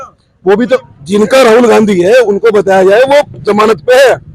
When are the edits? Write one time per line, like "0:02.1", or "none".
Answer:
0:00.9